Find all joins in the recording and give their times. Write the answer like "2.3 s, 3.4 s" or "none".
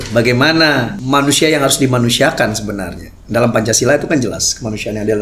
1.0 s

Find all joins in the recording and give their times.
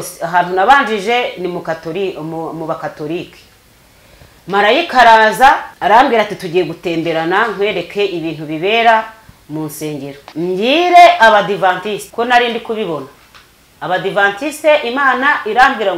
5.7 s, 10.2 s, 12.1 s

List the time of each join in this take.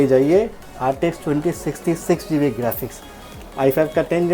none

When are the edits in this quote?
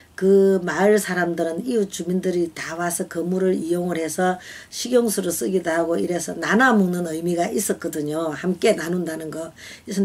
3.3 s

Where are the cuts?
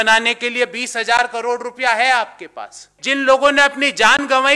3.0 s

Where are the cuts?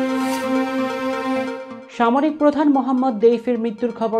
1.7 s

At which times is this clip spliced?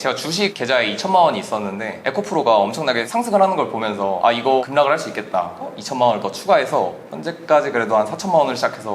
5.7 s, 7.1 s

